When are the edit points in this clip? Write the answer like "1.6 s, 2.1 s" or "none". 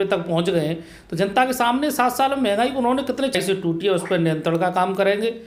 3.3 s